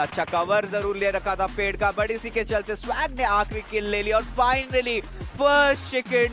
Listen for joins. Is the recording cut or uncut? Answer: uncut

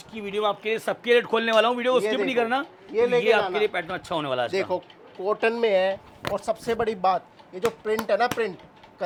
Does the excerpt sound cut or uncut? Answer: uncut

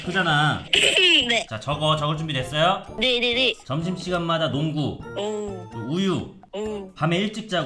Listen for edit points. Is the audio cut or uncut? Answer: uncut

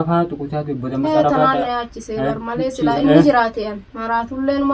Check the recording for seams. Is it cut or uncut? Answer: uncut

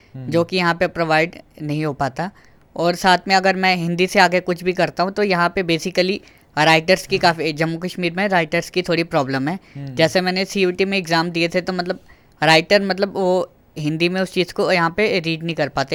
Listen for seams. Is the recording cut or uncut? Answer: uncut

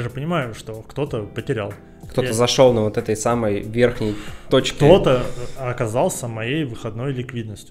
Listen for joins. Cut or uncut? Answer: uncut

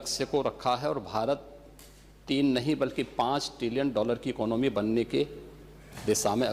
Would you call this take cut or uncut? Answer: uncut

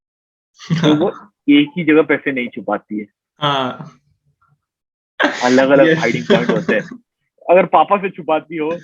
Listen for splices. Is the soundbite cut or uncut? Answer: uncut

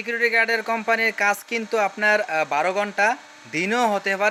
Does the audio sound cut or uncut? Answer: uncut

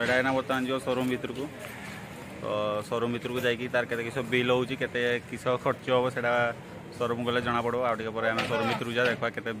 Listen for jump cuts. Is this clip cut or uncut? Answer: uncut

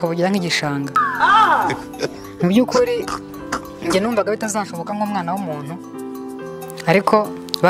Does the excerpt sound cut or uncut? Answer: uncut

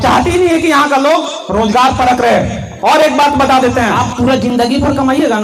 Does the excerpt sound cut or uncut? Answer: cut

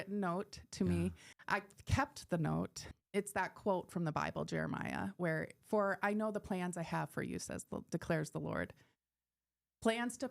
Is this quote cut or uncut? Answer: cut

